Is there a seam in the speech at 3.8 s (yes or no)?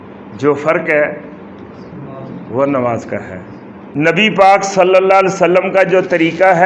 yes